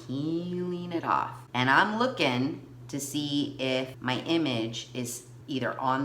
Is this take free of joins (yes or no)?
no